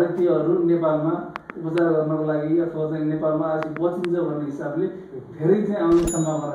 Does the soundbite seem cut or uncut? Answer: uncut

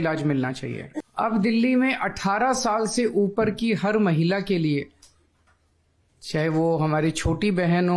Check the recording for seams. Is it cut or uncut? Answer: cut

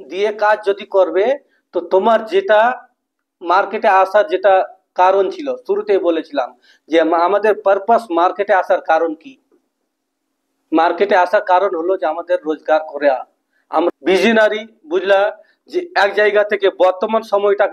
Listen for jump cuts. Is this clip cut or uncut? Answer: cut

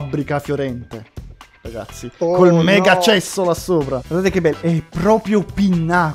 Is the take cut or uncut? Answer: cut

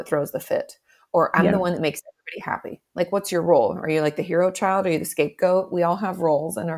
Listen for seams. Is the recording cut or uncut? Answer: uncut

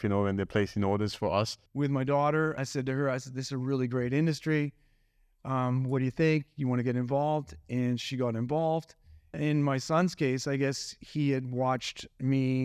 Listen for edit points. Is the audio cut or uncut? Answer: cut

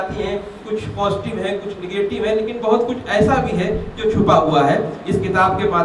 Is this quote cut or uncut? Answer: uncut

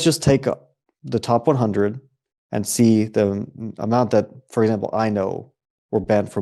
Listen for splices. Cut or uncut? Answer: uncut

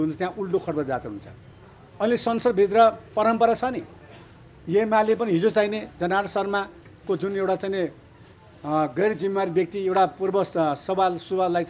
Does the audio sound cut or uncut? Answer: uncut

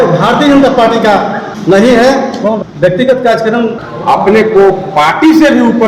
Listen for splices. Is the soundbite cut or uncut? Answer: cut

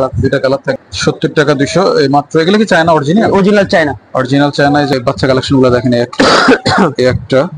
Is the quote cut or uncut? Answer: cut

